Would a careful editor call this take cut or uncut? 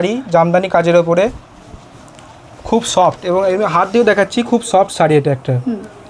uncut